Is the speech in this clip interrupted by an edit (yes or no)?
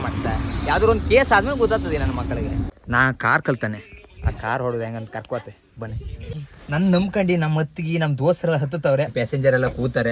yes